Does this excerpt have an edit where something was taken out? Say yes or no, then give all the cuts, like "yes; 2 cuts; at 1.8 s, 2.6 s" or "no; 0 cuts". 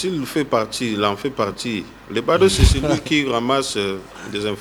no; 0 cuts